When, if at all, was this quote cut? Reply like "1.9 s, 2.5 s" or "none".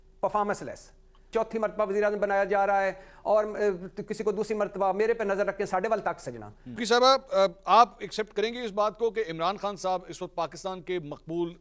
1.3 s, 6.8 s